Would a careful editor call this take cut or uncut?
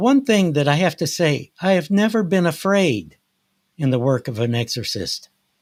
uncut